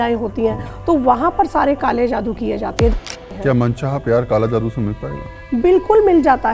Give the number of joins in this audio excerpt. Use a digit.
1